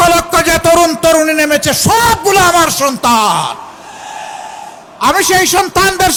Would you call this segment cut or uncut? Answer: uncut